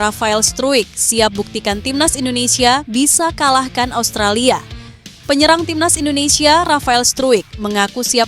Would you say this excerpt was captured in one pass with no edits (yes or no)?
yes